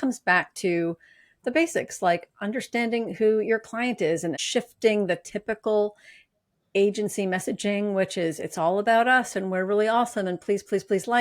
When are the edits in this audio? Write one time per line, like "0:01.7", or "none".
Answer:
0:04.4